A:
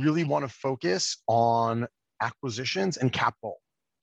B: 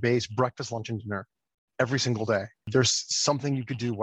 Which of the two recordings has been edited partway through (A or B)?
B